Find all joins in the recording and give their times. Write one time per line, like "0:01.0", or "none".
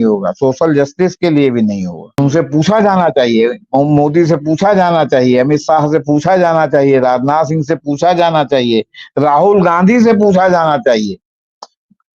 0:02.2